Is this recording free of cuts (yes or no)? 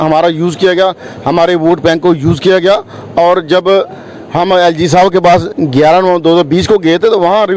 yes